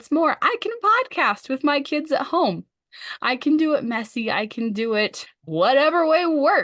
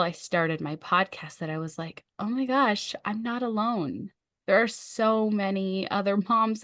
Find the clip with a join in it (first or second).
first